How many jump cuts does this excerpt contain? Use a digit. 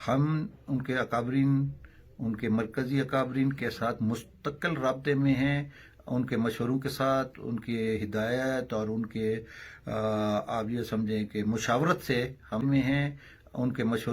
1